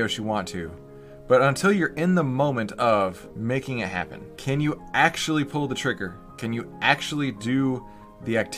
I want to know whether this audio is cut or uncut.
cut